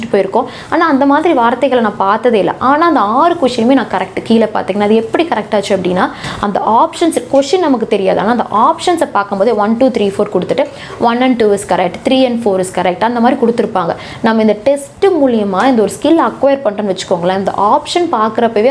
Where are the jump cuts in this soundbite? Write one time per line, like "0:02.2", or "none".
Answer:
none